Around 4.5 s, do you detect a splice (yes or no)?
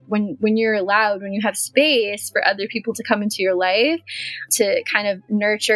yes